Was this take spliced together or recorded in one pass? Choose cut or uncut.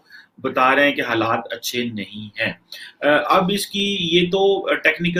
uncut